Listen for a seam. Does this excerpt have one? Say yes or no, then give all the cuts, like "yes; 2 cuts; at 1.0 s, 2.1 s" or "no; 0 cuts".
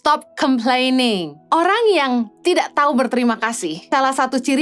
yes; 2 cuts; at 1.3 s, 3.8 s